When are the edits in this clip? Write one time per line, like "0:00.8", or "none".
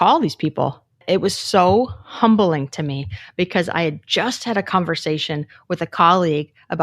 0:01.0